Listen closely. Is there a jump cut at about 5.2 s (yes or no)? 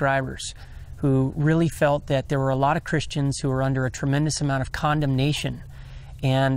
no